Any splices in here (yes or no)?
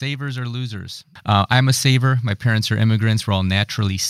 yes